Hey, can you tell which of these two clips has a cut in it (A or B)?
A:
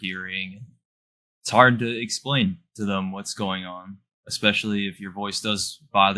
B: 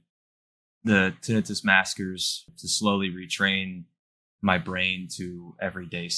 B